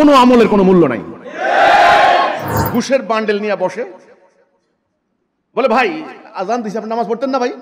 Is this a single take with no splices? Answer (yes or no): no